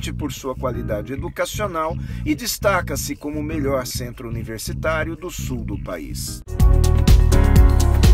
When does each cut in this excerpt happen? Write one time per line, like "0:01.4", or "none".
0:06.5